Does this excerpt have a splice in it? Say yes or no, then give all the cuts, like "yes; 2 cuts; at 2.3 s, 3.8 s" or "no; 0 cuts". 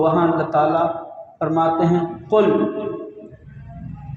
no; 0 cuts